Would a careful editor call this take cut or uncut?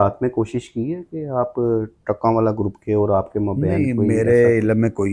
uncut